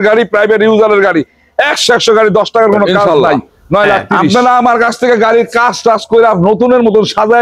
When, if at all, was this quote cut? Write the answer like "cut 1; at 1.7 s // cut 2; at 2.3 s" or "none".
cut 1; at 4.1 s